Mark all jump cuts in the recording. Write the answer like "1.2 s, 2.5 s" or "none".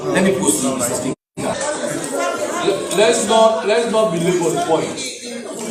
1.6 s